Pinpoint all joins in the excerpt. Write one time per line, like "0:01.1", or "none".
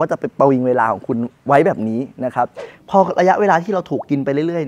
none